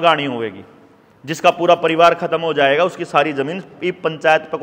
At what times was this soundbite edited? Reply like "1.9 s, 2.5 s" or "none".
none